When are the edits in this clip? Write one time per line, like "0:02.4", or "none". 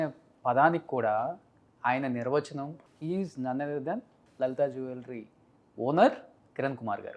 0:02.8
0:04.2

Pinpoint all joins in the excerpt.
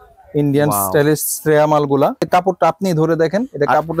0:02.2

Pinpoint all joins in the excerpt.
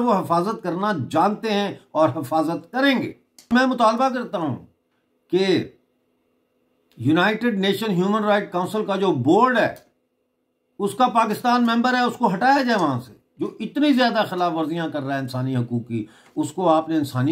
0:03.5

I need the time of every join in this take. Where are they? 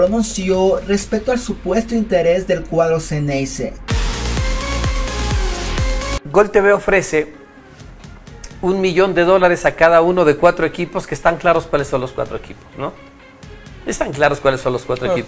0:03.9

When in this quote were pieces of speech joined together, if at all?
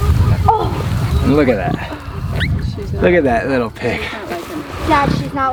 none

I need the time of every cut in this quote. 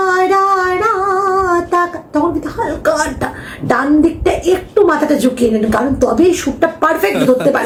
none

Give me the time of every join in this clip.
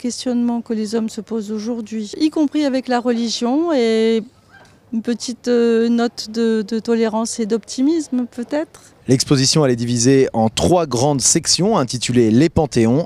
0:07.4

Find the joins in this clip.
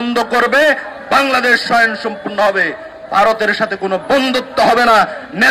none

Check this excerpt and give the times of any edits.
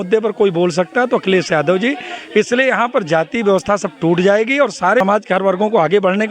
0:05.0

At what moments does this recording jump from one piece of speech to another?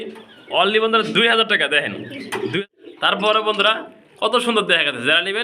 0:02.6

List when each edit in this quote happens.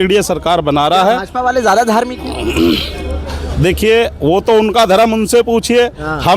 none

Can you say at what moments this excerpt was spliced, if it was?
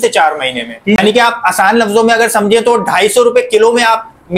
0:01.0

